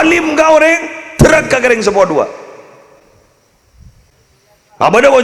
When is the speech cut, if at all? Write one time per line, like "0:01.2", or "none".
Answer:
0:04.1

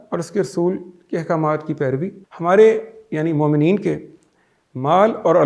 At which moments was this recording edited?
0:02.2

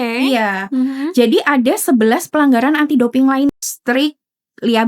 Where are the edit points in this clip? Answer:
0:03.5

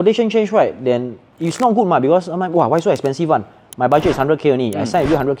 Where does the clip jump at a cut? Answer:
none

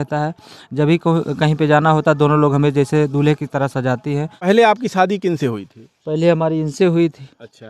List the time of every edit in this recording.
0:04.5

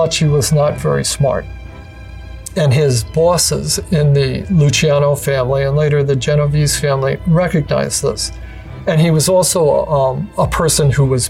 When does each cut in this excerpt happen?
0:10.2

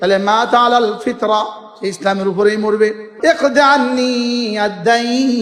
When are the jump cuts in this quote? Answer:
0:03.0

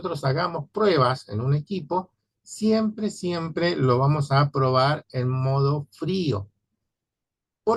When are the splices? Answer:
none

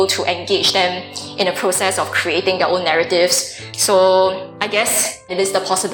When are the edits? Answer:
0:03.7
0:04.8

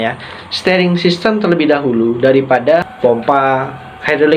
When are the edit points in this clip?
0:02.9

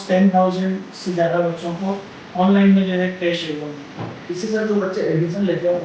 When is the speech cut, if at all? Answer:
0:04.1

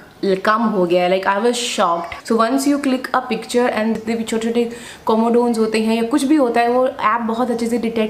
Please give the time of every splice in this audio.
0:02.1
0:04.0

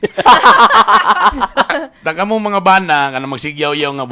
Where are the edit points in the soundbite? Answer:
0:01.7

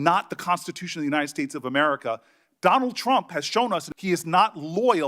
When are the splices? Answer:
0:03.9

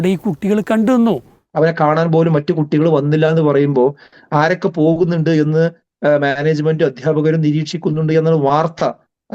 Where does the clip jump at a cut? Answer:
0:01.4

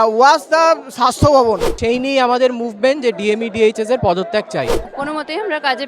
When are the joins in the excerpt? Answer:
0:01.7
0:04.9

